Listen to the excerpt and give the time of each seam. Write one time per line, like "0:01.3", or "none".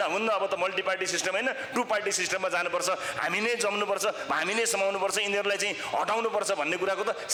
none